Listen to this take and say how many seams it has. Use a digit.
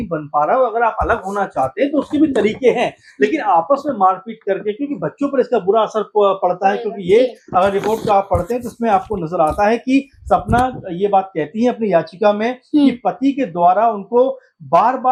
0